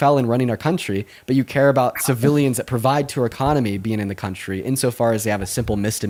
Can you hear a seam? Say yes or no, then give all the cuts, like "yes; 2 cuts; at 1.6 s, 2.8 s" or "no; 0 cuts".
no; 0 cuts